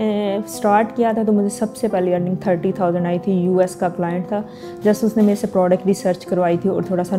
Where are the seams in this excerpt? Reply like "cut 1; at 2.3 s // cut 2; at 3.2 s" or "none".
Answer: none